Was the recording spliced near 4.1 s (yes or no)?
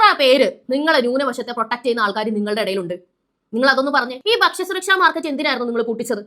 yes